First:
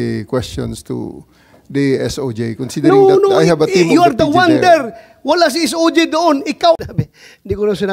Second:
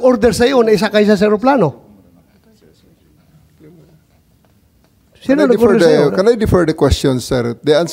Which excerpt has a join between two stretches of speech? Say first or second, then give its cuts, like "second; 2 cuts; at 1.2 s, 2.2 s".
first; 1 cut; at 6.8 s